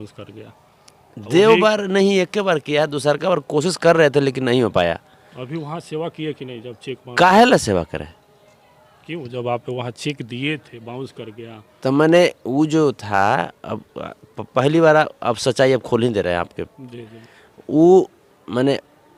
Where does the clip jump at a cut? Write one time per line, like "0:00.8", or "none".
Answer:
none